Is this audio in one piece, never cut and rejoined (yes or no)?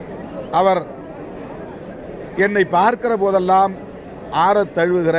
yes